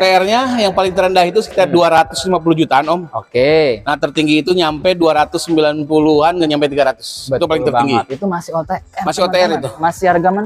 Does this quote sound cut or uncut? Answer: uncut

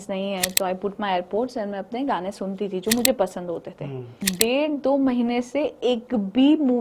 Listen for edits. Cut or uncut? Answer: cut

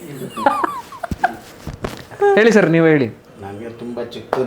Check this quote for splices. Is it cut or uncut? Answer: uncut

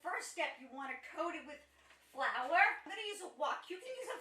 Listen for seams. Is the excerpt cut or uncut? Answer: cut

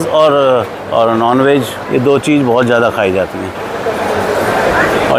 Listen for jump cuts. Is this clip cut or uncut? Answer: uncut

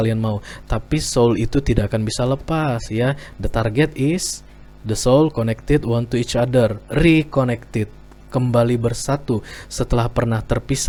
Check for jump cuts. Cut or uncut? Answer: uncut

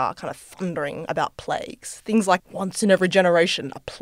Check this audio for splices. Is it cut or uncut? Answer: cut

